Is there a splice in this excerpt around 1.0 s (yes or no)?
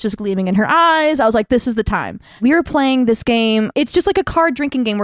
no